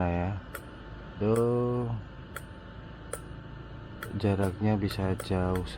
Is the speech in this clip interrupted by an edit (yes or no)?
no